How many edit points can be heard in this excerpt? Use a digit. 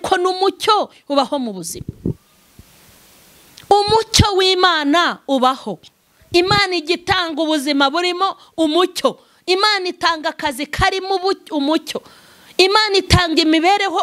0